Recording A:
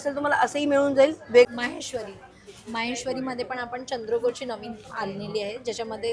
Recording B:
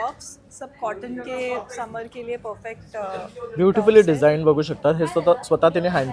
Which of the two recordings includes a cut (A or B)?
A